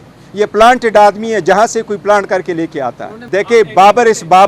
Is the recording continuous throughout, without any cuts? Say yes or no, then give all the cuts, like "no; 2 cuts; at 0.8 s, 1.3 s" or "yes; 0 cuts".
no; 1 cut; at 3.1 s